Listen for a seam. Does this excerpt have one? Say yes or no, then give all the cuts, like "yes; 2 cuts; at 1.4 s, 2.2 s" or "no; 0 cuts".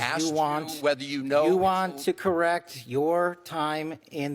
no; 0 cuts